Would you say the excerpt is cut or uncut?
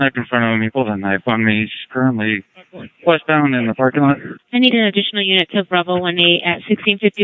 cut